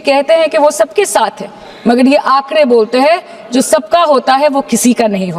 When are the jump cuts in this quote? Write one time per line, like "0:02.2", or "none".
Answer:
none